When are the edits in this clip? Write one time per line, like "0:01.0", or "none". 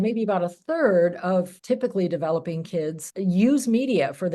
0:01.6
0:03.0

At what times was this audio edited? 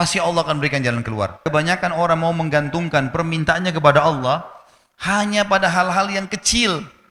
0:01.4

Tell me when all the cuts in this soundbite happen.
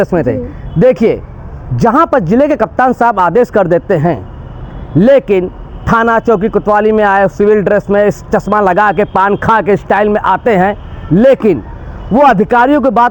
none

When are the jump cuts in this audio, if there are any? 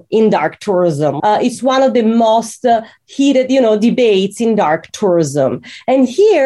0:01.2

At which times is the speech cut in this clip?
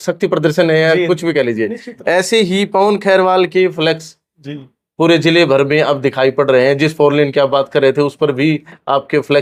none

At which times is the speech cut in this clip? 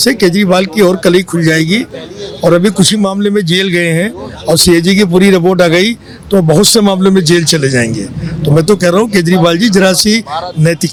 none

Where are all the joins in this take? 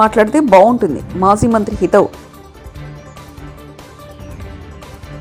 none

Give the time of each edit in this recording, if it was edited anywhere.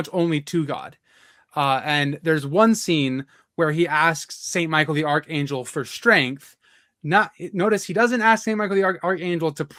none

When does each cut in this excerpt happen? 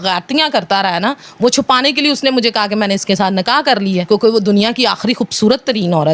none

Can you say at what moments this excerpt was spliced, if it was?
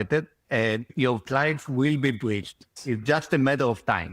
0:00.9
0:02.7

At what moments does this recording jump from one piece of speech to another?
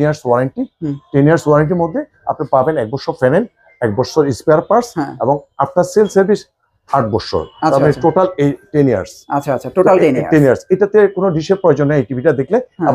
none

